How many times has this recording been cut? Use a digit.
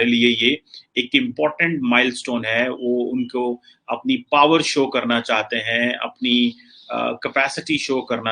0